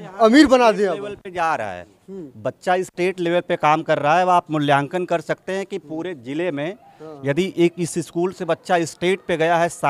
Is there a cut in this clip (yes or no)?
no